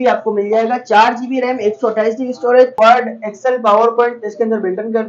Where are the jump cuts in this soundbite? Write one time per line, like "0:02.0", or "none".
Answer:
0:02.8